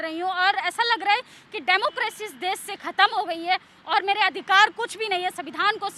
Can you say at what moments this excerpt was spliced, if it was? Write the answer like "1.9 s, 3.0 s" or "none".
none